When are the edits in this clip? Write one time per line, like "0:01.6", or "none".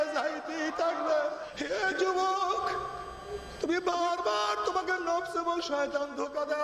0:01.6